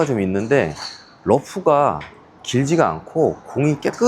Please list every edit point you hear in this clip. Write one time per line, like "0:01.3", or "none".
none